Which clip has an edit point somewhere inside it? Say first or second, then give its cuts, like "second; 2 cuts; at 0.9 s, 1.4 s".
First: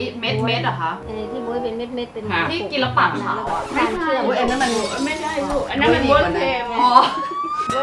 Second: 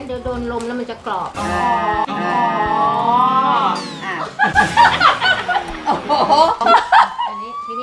second; 1 cut; at 6.6 s